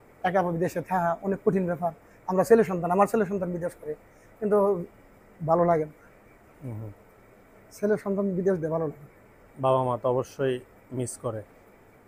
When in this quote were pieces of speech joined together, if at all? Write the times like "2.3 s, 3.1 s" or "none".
none